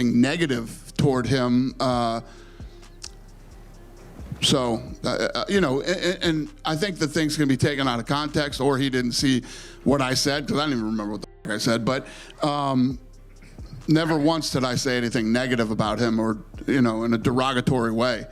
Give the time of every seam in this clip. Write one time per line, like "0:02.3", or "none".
none